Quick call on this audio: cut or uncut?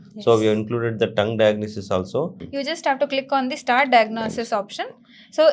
cut